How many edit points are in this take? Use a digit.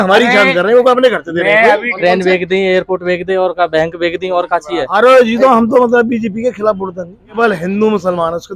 3